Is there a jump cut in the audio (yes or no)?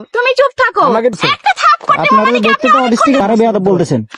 yes